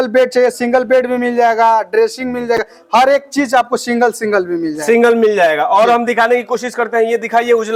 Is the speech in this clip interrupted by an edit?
no; 0 cuts

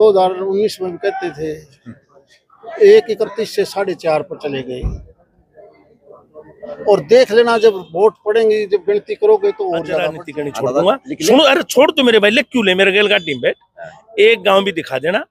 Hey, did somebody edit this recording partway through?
yes; 1 cut; at 10.2 s

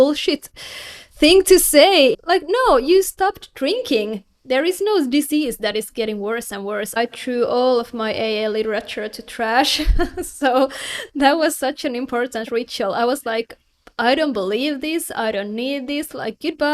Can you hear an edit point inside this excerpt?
yes; 2 cuts; at 2.2 s, 7.0 s

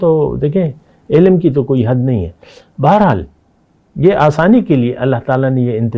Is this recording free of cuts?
yes; 0 cuts

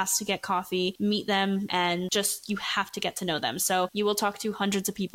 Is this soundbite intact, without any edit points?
yes; 0 cuts

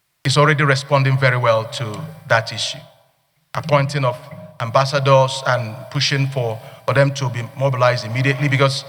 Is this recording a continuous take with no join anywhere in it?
yes; 0 cuts

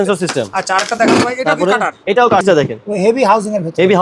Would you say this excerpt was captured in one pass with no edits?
no; 1 cut; at 2.4 s

